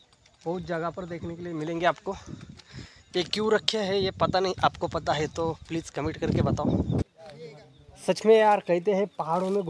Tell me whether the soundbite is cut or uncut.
cut